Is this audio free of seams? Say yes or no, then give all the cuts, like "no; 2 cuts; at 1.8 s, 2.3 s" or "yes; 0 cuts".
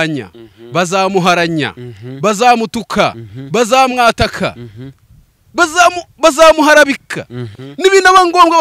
yes; 0 cuts